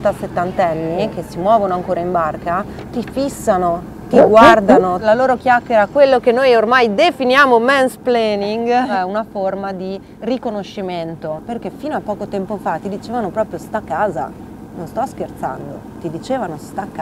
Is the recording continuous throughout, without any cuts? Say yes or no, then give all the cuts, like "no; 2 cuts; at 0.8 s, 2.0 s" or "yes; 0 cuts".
no; 3 cuts; at 5.0 s, 8.9 s, 11.4 s